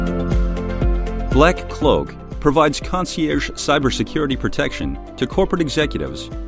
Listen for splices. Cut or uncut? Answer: cut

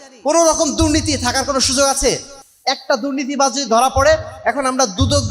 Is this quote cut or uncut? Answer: uncut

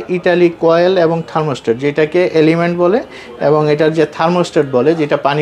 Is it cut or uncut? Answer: uncut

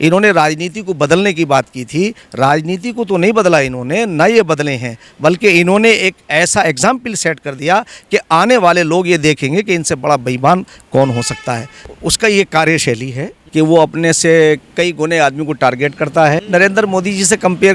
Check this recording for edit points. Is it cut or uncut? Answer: cut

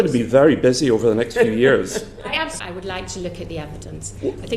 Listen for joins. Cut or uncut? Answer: cut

